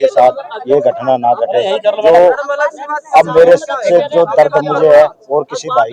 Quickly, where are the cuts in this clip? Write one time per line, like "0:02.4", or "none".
none